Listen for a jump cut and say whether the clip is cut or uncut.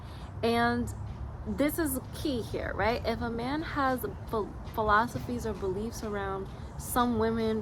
uncut